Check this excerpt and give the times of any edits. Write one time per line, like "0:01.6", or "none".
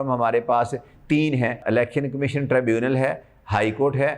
0:01.6